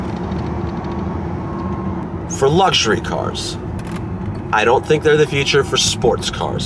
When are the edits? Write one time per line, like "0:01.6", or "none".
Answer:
0:02.0